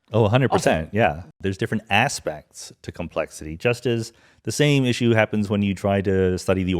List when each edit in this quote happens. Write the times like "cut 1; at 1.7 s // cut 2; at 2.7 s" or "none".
cut 1; at 1.2 s